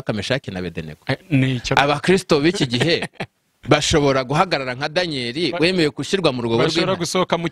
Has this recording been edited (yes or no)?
no